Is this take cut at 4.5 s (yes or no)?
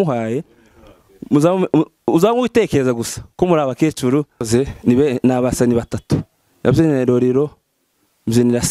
yes